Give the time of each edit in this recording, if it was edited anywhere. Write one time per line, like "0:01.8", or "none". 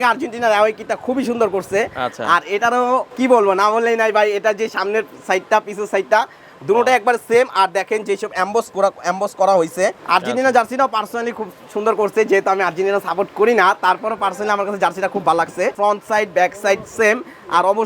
0:03.1
0:10.0
0:15.7